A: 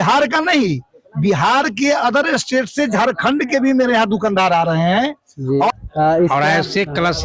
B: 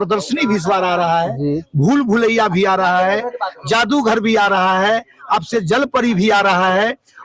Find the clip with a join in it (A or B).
A